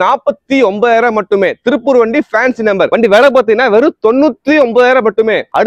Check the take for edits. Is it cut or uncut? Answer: cut